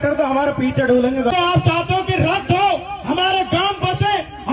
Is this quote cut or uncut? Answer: cut